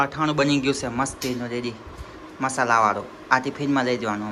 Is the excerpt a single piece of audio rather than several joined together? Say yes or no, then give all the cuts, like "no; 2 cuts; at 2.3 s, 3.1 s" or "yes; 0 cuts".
yes; 0 cuts